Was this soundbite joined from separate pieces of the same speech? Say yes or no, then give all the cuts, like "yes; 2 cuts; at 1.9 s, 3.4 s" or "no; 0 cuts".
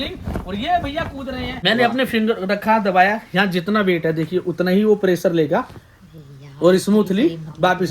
yes; 1 cut; at 1.6 s